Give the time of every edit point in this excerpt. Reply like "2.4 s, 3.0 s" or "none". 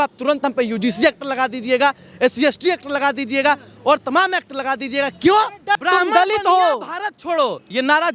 5.8 s